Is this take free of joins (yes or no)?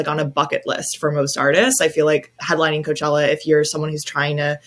no